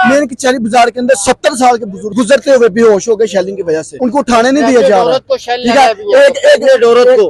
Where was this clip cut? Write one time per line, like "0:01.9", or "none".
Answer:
0:02.0
0:03.9